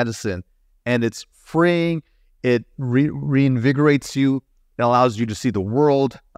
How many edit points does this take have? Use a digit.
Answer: 0